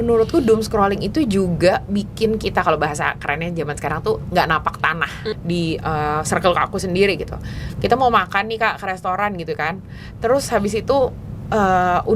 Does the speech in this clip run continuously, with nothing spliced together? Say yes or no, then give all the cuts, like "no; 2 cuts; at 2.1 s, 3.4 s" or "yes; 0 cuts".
no; 1 cut; at 5.3 s